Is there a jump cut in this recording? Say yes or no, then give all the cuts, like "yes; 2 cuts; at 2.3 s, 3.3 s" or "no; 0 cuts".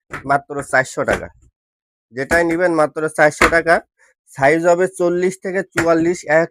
no; 0 cuts